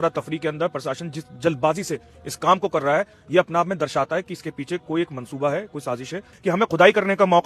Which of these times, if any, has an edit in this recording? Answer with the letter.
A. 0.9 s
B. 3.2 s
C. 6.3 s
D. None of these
C